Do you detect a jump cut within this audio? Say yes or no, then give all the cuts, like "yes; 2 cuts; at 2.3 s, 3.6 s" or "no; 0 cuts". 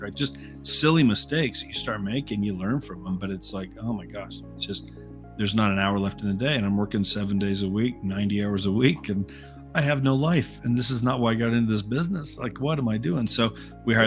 no; 0 cuts